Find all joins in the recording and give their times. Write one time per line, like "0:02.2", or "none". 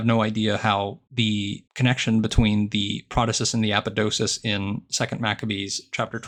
none